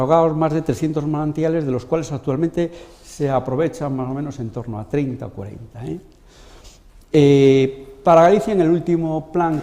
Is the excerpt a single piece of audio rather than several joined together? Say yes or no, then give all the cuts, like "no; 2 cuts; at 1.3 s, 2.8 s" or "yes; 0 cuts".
no; 1 cut; at 3.4 s